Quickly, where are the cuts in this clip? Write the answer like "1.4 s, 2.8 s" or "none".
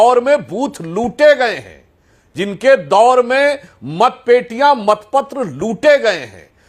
none